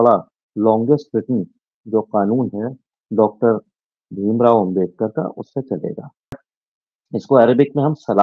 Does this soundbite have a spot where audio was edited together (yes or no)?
yes